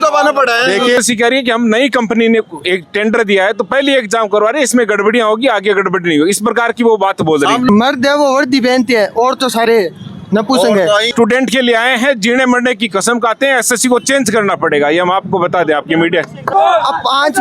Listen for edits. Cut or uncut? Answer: cut